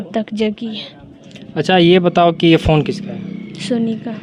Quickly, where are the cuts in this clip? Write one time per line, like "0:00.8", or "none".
none